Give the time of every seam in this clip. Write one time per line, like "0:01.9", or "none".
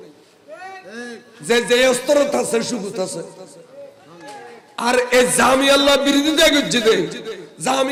none